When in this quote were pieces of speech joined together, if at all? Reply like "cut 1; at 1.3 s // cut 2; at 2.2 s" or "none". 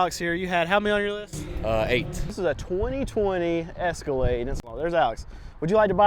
cut 1; at 2.3 s // cut 2; at 4.6 s